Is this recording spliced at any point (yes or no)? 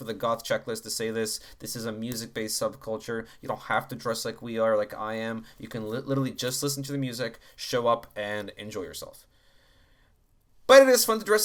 no